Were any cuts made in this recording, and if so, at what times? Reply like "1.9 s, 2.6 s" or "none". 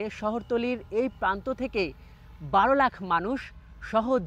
none